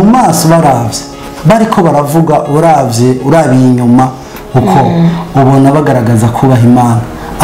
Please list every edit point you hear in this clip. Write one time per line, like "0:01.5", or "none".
none

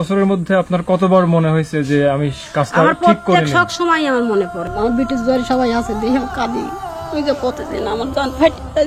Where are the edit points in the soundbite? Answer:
0:04.6

